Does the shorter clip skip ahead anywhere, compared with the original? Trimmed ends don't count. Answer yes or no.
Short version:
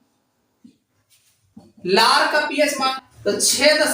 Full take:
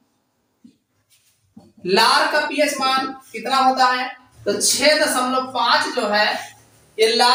yes